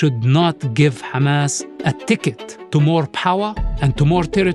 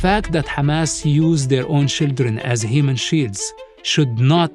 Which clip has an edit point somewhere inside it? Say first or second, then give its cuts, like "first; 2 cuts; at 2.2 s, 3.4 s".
first; 2 cuts; at 1.7 s, 2.5 s